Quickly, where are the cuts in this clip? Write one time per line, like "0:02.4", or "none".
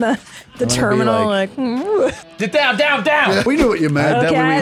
0:02.2
0:03.5